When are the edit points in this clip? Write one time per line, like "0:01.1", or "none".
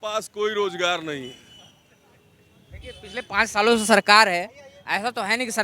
none